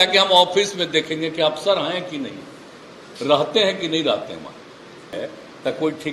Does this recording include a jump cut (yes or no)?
yes